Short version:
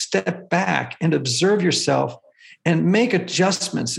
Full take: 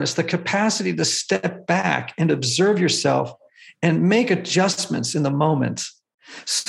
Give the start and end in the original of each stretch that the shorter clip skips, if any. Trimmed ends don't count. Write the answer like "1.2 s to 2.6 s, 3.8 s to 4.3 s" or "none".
none